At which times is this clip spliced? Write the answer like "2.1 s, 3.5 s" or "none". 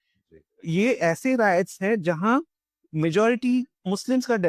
none